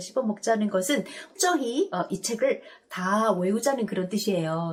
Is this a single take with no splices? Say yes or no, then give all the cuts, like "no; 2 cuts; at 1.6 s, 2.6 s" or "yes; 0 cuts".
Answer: yes; 0 cuts